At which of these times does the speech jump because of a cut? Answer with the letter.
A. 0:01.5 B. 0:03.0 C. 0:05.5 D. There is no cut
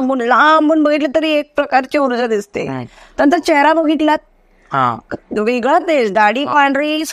D